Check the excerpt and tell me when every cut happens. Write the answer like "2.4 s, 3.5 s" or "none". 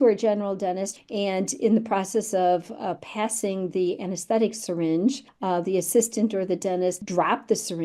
0.9 s, 5.3 s, 7.0 s